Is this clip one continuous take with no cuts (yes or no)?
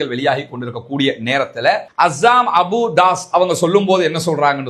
no